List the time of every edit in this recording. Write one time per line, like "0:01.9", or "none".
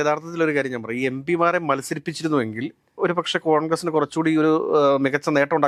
none